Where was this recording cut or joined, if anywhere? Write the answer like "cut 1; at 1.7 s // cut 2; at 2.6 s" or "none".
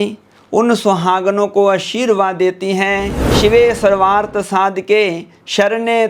cut 1; at 3.2 s